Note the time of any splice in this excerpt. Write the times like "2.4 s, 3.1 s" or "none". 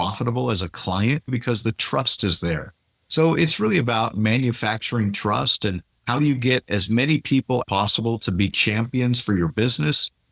1.3 s, 7.6 s